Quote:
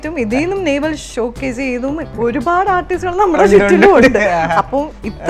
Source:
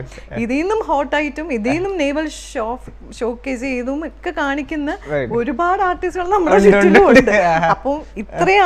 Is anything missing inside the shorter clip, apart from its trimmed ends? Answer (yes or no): yes